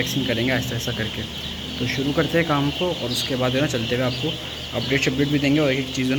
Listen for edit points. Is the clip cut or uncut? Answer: uncut